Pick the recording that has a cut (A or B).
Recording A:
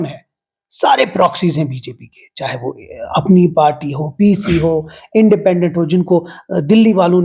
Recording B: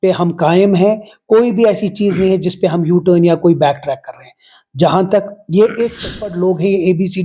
B